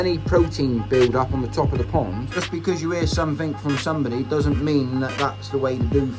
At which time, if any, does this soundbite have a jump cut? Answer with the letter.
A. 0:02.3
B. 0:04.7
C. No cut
A